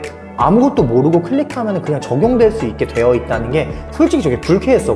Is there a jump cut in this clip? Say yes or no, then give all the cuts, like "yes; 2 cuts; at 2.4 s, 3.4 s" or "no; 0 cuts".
no; 0 cuts